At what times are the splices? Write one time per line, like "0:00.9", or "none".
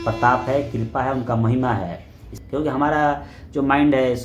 0:02.4